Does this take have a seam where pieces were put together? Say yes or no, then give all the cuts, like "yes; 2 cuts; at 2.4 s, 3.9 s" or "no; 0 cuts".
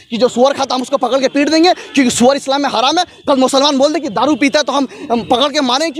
no; 0 cuts